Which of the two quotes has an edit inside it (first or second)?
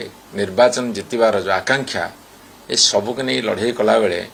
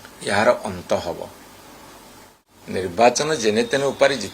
second